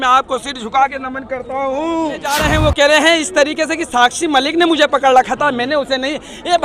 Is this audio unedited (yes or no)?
no